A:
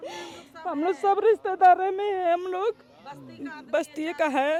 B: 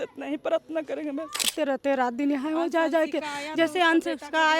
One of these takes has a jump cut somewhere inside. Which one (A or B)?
B